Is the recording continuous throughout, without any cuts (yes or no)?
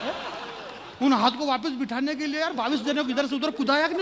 yes